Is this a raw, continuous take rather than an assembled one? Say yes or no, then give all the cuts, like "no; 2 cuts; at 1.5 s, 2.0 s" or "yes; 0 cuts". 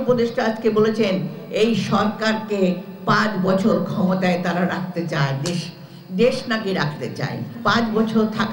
no; 1 cut; at 7.5 s